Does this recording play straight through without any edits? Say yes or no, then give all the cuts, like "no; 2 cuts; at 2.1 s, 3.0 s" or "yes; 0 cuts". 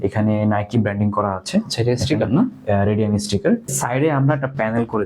no; 1 cut; at 3.7 s